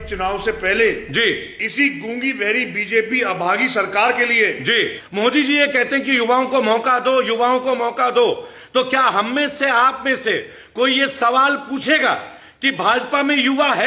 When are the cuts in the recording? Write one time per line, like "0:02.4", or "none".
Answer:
0:05.0